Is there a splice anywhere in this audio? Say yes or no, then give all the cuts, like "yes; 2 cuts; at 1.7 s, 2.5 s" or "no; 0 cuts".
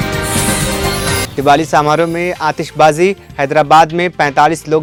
no; 0 cuts